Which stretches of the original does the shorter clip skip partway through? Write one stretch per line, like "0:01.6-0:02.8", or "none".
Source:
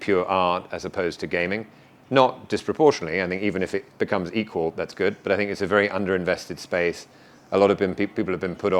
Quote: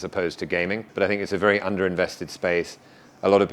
0:01.7-0:05.2